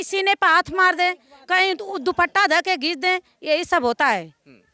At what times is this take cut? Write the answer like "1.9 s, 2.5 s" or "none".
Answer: none